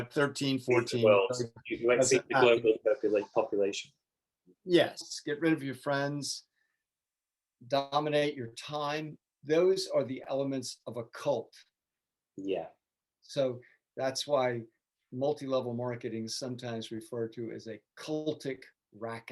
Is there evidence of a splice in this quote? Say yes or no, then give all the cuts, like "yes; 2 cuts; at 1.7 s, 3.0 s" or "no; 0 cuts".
yes; 1 cut; at 5.1 s